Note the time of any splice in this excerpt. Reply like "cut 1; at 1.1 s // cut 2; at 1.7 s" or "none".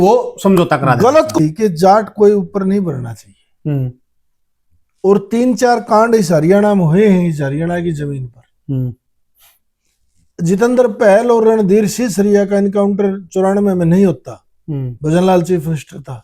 cut 1; at 1.2 s